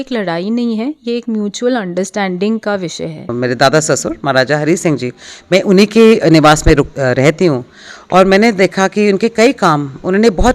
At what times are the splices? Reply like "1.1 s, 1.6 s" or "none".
3.3 s